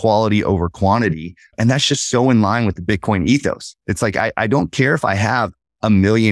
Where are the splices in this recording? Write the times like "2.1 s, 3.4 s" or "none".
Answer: 1.5 s